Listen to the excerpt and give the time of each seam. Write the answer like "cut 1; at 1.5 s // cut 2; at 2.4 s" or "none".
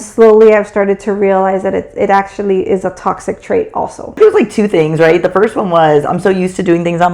cut 1; at 4.1 s